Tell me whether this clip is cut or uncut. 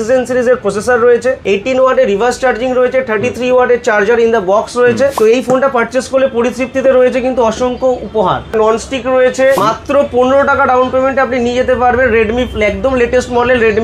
cut